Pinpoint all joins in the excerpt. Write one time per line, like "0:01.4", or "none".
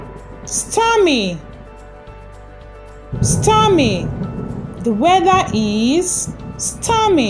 none